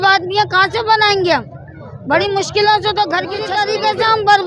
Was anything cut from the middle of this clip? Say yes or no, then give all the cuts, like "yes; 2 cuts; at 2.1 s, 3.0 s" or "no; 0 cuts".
yes; 1 cut; at 3.5 s